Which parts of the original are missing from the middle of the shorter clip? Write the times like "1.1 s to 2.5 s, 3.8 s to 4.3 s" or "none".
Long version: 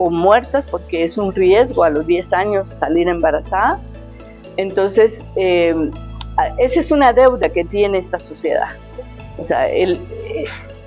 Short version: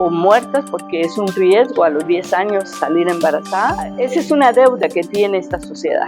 3.9 s to 6.5 s